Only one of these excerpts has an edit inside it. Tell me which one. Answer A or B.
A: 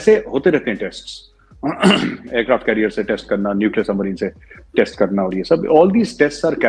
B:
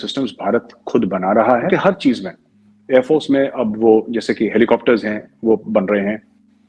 B